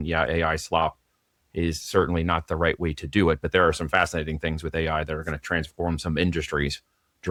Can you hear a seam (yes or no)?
no